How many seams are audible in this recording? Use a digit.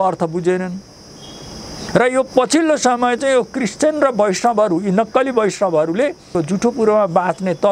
1